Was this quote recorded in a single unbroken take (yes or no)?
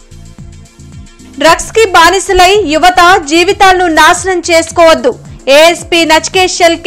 no